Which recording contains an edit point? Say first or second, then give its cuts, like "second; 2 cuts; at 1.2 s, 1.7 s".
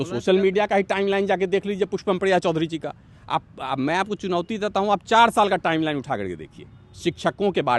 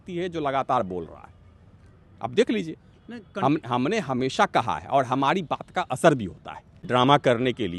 second; 1 cut; at 6.8 s